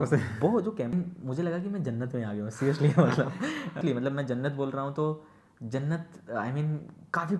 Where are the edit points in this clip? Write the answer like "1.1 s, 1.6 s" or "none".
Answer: 0.9 s, 3.8 s